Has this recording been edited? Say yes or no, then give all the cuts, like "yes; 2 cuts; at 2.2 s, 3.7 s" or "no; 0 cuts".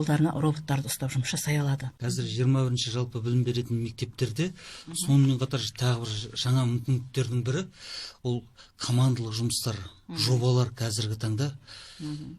yes; 1 cut; at 1.9 s